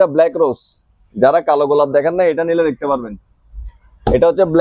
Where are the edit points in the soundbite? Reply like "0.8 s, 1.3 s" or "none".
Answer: none